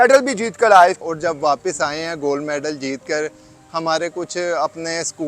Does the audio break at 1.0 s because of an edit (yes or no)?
yes